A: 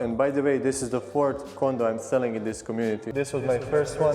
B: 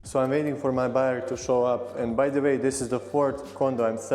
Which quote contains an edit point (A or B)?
A